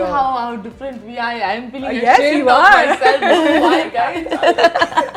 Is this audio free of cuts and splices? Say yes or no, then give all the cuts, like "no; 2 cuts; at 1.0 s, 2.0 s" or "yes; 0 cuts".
yes; 0 cuts